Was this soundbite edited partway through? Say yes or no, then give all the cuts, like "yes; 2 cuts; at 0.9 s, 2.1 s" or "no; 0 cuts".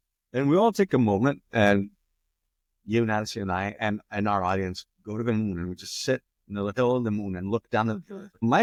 no; 0 cuts